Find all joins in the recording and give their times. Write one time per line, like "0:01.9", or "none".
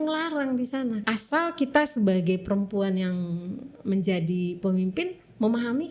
0:01.0